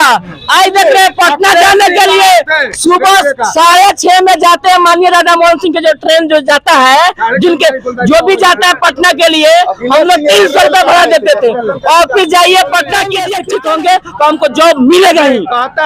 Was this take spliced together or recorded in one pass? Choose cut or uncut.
cut